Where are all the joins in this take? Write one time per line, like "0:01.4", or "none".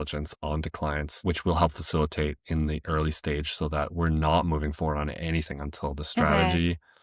0:01.1